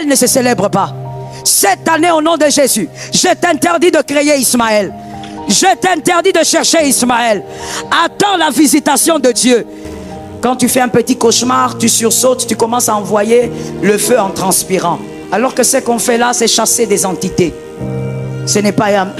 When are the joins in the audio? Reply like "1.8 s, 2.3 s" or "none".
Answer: 10.2 s